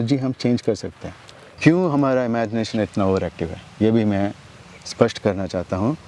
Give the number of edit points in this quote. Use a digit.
1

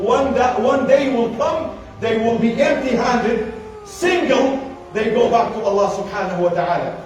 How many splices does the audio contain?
0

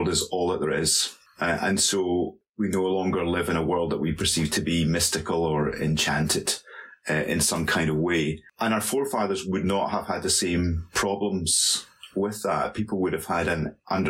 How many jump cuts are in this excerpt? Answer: 0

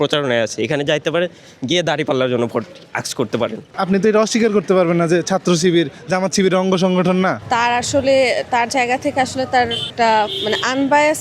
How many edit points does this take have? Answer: 3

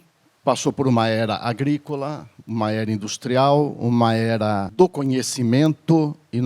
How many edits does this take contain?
1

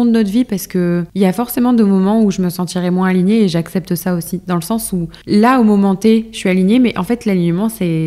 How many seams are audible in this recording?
2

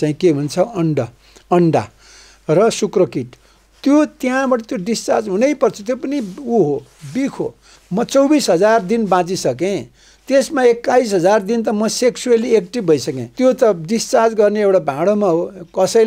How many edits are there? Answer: 2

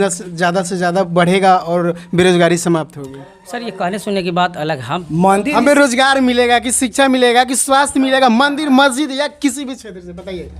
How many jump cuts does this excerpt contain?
1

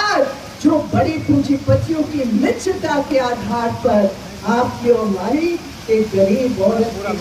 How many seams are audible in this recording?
0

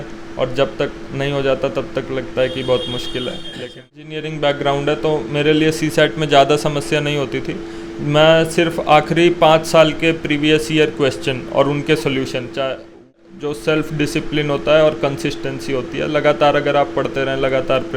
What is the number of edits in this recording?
2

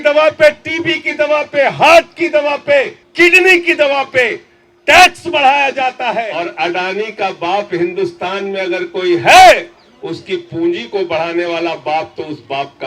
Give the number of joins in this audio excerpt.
2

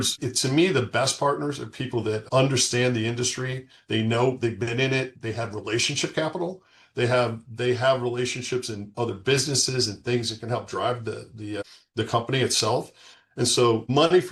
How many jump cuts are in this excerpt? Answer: 0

